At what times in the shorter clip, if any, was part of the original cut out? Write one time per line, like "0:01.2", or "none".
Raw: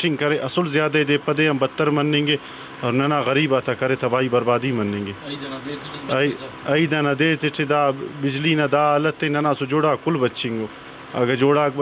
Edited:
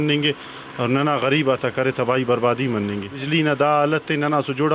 0:03.2